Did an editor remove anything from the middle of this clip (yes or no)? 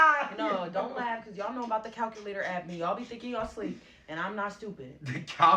yes